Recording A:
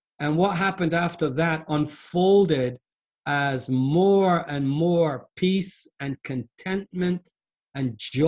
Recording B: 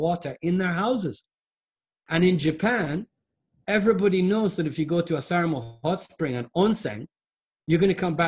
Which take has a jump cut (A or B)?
B